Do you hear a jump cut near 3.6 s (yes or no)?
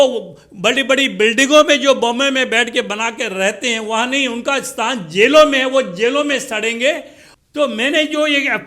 no